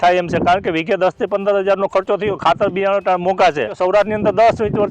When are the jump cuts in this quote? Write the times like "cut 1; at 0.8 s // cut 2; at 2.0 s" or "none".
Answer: cut 1; at 3.8 s